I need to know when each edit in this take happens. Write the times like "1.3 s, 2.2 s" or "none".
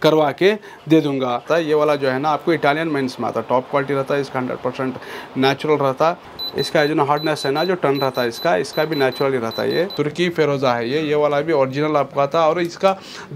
1.4 s, 6.3 s, 9.9 s